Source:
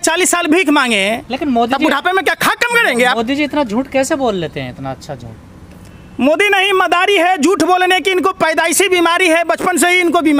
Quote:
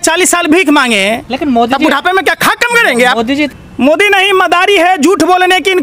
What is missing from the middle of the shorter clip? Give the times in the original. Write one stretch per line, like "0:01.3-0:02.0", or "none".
0:03.5-0:05.9